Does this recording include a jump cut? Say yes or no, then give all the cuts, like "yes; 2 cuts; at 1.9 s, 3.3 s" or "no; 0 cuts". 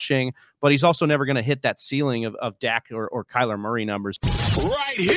yes; 1 cut; at 4.2 s